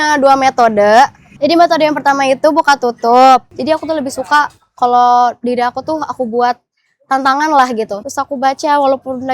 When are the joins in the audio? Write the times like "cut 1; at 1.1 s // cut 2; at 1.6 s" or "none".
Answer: cut 1; at 3.5 s // cut 2; at 8.0 s